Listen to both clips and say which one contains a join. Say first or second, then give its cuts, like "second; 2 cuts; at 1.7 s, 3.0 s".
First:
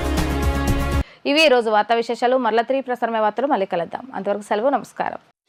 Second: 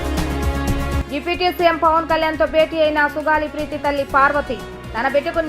second; 1 cut; at 1.0 s